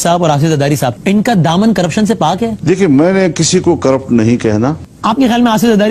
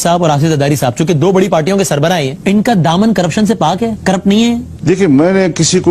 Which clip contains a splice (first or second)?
first